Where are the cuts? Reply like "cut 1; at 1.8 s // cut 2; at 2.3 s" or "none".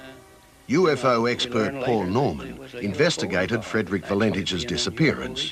cut 1; at 1.8 s